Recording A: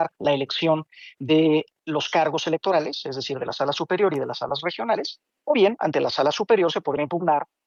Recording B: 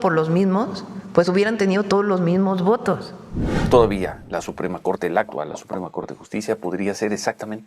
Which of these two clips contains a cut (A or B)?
B